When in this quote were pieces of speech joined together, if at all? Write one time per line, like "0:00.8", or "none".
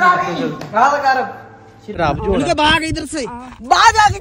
0:01.9